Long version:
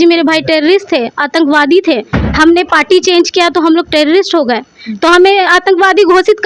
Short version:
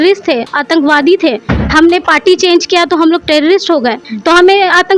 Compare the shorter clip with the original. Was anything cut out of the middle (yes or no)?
yes